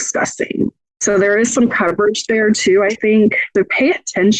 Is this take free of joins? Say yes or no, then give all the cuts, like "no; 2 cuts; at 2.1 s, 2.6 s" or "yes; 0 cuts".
yes; 0 cuts